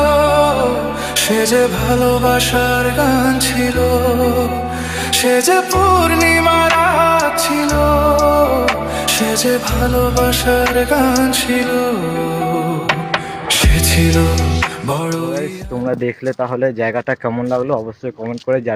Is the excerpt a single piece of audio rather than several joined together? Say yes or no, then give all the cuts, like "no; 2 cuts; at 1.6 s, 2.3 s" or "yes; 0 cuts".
yes; 0 cuts